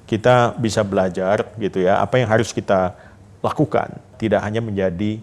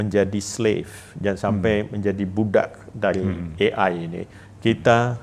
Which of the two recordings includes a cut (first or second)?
first